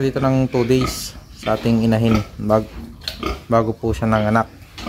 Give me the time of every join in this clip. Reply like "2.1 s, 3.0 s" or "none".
none